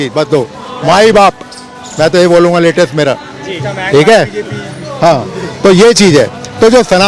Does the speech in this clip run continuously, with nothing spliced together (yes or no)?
yes